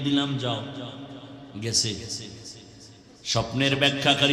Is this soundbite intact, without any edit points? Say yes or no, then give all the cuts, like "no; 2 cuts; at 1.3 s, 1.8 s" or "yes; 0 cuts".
yes; 0 cuts